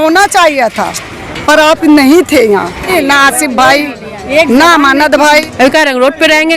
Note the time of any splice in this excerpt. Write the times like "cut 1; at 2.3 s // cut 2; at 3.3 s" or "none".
cut 1; at 2.9 s // cut 2; at 5.5 s